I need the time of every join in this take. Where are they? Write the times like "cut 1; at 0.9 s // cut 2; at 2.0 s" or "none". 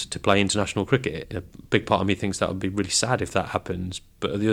cut 1; at 1.2 s